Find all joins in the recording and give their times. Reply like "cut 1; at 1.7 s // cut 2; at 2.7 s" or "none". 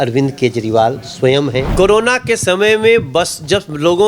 cut 1; at 1.7 s